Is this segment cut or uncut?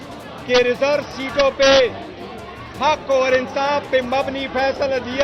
uncut